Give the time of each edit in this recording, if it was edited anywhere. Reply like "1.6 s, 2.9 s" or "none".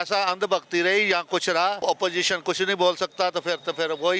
1.8 s